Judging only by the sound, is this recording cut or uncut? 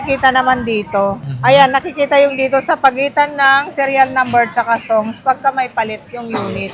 uncut